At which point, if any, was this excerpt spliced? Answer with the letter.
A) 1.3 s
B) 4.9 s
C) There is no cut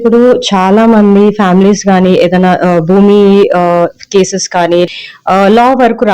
B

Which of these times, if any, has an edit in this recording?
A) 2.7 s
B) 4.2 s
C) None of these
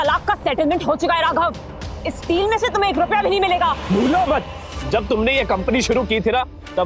C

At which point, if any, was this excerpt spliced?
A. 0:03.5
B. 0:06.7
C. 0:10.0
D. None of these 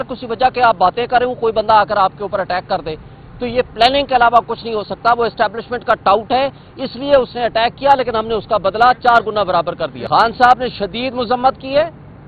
C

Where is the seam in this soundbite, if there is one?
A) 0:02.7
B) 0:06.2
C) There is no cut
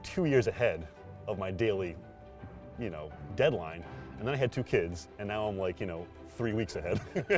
C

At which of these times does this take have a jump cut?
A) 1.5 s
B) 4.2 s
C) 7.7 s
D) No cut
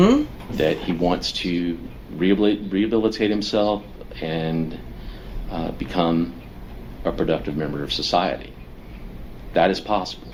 D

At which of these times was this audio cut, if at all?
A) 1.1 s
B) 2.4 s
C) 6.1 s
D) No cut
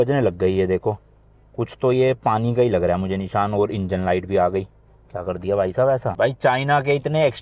C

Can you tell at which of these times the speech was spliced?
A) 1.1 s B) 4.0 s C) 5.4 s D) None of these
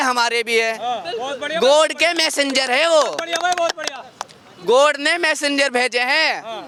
D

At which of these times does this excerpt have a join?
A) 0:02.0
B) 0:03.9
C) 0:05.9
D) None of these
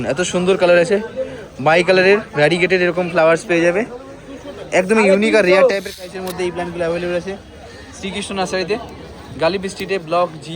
C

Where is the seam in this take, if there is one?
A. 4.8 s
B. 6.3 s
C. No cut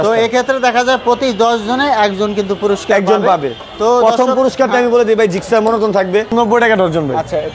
B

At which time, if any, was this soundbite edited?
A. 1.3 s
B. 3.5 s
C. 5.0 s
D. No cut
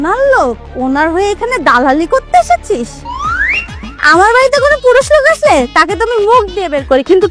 D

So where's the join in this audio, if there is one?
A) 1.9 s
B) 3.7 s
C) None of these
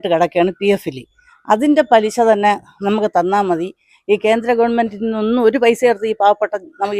C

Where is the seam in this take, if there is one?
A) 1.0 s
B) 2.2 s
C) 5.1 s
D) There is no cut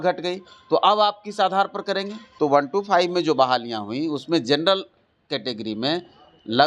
B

